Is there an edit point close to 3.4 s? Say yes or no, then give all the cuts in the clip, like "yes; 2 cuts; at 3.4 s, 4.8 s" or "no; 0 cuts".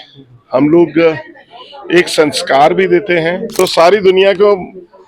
yes; 1 cut; at 3.4 s